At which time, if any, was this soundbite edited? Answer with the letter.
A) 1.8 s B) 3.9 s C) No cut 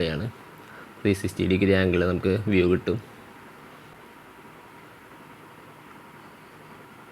B